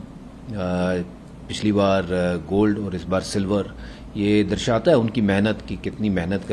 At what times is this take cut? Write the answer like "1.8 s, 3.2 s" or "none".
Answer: none